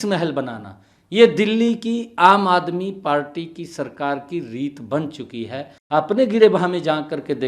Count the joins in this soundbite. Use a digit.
1